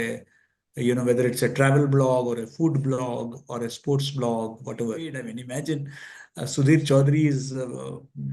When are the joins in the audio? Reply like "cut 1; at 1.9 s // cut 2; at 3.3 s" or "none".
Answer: cut 1; at 5.1 s